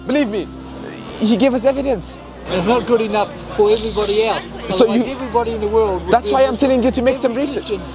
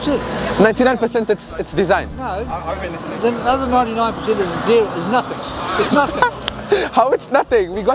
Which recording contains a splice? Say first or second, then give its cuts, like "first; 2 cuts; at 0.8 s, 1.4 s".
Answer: first; 1 cut; at 2.4 s